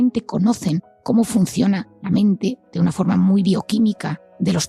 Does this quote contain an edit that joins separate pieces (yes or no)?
no